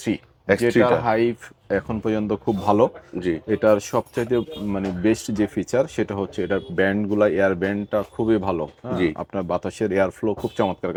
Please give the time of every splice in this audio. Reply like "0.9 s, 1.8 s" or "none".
none